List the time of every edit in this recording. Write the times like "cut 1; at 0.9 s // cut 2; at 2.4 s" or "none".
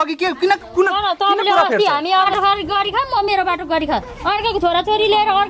cut 1; at 2.3 s